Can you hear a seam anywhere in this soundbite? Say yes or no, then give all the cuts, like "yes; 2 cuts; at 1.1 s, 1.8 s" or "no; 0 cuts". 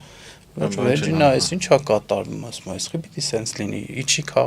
no; 0 cuts